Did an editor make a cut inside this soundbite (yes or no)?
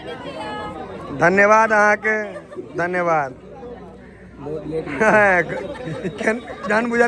no